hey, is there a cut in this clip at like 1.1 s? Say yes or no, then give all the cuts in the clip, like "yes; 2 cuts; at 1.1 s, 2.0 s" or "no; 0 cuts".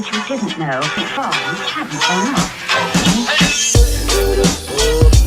yes; 1 cut; at 1.1 s